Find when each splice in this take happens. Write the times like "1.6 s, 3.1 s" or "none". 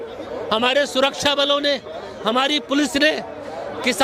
none